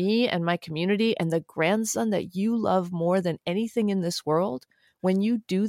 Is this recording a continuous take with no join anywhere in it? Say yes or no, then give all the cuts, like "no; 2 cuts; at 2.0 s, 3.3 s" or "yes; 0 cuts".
yes; 0 cuts